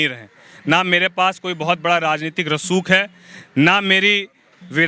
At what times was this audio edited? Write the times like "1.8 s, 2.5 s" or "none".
none